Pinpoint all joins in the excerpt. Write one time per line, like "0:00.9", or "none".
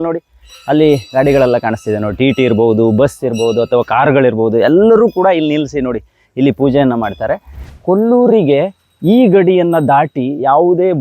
0:07.6